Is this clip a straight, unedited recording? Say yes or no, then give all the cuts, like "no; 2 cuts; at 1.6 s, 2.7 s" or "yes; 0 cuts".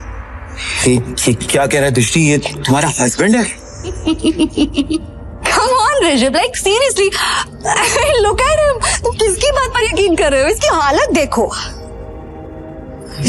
no; 1 cut; at 4.0 s